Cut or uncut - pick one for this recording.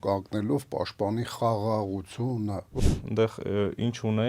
cut